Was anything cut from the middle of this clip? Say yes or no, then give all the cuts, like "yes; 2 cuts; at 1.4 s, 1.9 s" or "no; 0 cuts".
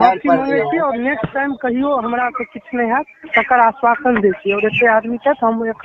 no; 0 cuts